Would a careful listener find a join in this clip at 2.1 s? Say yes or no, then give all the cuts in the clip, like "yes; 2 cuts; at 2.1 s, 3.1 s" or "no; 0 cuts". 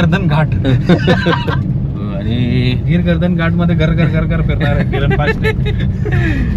yes; 1 cut; at 2.1 s